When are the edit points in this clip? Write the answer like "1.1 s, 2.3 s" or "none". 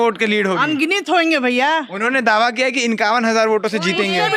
none